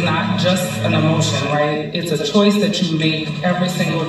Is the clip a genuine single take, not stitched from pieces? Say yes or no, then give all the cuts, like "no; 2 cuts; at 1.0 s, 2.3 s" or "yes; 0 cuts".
yes; 0 cuts